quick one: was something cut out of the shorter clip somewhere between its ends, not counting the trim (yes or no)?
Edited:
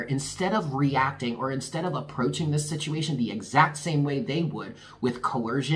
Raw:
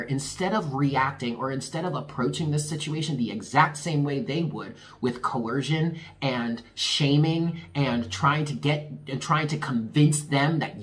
no